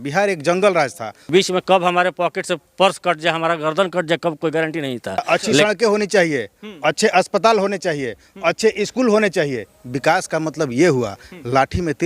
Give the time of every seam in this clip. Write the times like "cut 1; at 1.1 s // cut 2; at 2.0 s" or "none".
cut 1; at 1.3 s // cut 2; at 5.4 s